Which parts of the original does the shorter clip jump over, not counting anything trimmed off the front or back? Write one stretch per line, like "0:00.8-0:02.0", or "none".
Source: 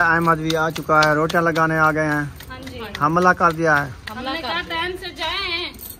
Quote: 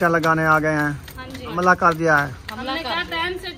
0:02.9-0:03.1